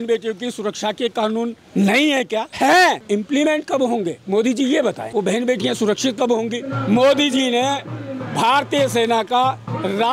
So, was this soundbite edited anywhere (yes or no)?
yes